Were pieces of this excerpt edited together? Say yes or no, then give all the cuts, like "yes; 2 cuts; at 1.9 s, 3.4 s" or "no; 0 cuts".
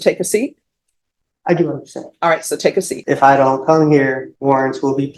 yes; 2 cuts; at 2.9 s, 4.3 s